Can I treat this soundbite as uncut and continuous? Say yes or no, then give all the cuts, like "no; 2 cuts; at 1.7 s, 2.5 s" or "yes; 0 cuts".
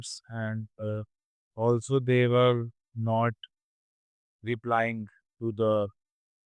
yes; 0 cuts